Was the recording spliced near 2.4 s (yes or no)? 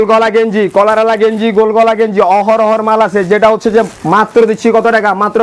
no